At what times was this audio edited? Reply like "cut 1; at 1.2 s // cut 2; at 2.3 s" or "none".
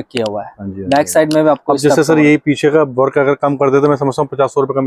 none